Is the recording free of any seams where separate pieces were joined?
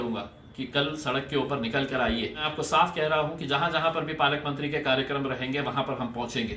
no; 1 cut; at 2.5 s

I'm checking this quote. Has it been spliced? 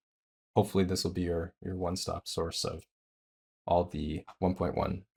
no; 0 cuts

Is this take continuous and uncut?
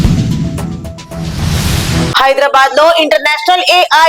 no; 1 cut; at 1.9 s

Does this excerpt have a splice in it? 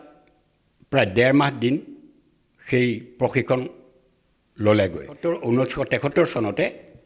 yes; 1 cut; at 5.1 s

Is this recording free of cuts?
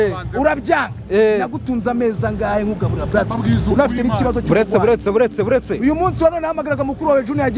yes; 0 cuts

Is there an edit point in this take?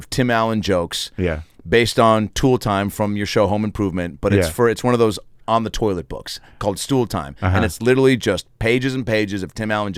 no; 0 cuts

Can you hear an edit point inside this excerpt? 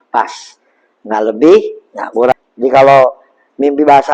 yes; 1 cut; at 2.3 s

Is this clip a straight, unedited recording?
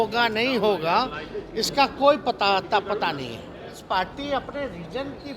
no; 1 cut; at 3.8 s

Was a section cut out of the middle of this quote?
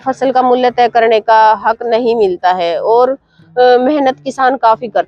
no; 0 cuts

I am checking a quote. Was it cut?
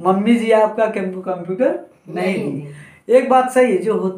no; 0 cuts

